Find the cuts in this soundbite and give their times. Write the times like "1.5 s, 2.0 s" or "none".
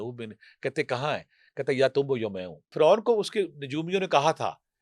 2.7 s